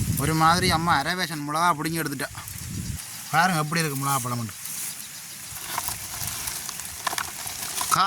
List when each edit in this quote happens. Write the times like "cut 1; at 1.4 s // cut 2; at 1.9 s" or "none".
cut 1; at 2.9 s